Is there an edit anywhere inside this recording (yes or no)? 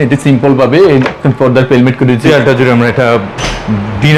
yes